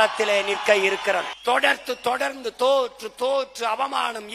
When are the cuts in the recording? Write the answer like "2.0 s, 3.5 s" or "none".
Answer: 1.3 s

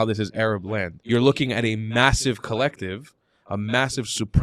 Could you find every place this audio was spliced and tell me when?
0.9 s

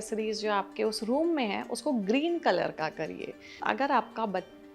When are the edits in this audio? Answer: 3.6 s

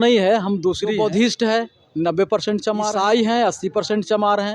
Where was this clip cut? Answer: 0.9 s, 2.9 s

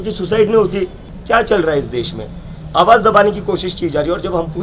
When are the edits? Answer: 1.1 s

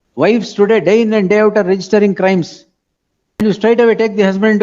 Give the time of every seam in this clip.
3.7 s

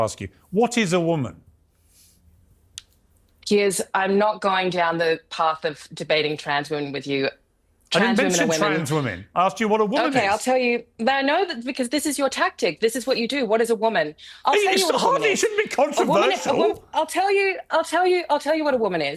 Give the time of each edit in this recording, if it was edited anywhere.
none

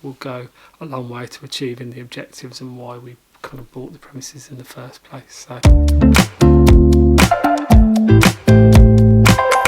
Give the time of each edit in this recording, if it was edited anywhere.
5.6 s

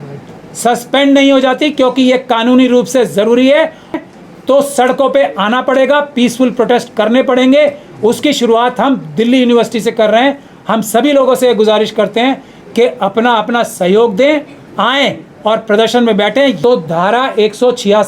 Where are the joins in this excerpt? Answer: 4.0 s, 16.6 s

